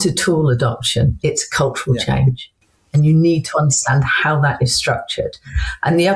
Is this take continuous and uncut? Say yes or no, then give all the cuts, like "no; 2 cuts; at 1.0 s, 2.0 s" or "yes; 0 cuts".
yes; 0 cuts